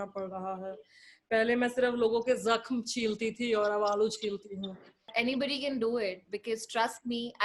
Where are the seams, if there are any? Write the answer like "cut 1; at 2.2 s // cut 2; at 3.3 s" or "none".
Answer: cut 1; at 5.1 s